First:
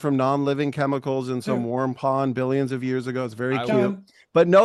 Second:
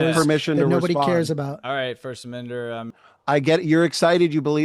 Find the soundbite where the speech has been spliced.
second; 1 cut; at 3.1 s

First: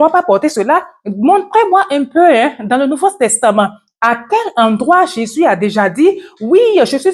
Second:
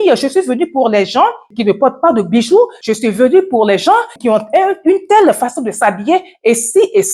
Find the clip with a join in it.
second; 3 cuts; at 1.5 s, 2.8 s, 4.1 s

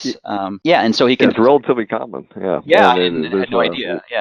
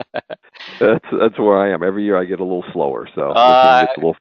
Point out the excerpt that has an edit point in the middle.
second; 1 cut; at 1.0 s

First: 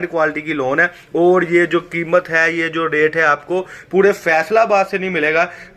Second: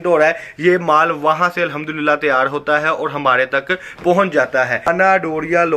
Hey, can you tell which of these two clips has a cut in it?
second; 1 cut; at 4.9 s

